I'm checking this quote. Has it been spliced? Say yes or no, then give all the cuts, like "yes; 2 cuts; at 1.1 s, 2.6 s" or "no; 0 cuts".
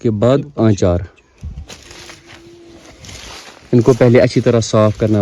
no; 0 cuts